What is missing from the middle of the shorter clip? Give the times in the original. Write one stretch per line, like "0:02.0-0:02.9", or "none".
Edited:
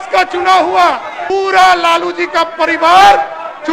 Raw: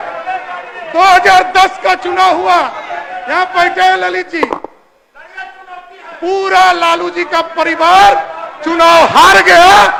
0:02.9-0:06.1